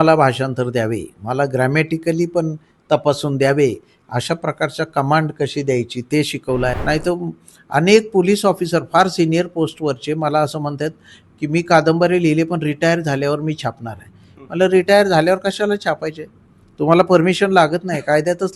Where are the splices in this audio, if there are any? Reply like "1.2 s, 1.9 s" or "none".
6.8 s